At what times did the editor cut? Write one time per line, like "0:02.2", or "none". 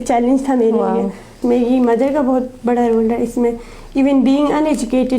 0:01.4